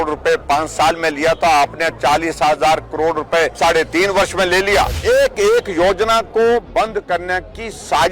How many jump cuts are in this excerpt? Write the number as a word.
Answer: two